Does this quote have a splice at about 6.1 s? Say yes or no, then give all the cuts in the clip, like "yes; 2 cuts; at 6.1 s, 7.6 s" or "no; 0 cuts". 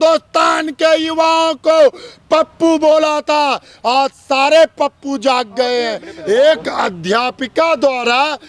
yes; 1 cut; at 6.1 s